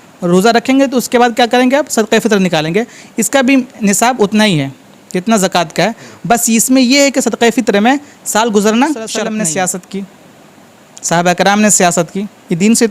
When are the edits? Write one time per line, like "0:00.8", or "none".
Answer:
0:09.1